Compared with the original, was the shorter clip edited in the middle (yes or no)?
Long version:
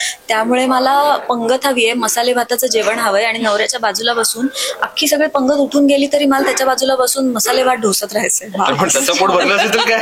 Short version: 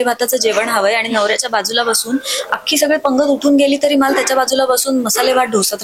no